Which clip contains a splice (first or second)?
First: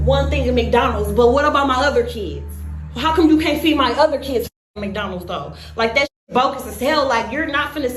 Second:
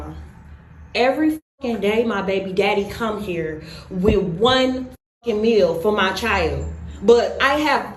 first